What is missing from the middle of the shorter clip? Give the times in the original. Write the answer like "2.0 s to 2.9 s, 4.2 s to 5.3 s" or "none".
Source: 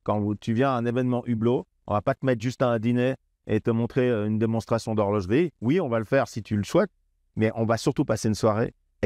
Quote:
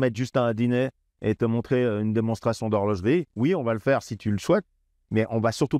none